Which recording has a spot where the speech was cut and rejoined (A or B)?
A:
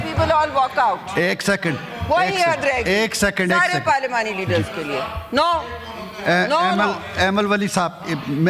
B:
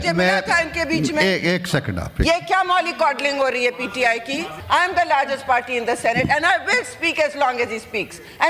B